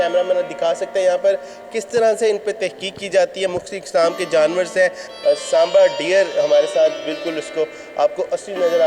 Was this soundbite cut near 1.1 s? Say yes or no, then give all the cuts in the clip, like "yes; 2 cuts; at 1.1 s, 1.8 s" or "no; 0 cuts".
no; 1 cut; at 5.1 s